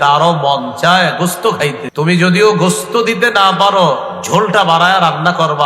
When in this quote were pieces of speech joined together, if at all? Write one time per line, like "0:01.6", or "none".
0:01.8